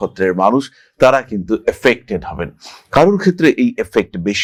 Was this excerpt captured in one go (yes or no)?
yes